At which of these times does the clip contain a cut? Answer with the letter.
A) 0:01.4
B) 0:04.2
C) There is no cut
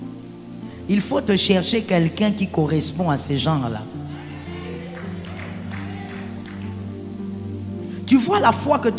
C